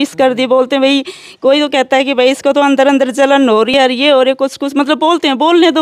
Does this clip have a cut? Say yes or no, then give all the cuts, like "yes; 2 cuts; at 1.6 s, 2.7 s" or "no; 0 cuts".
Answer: no; 0 cuts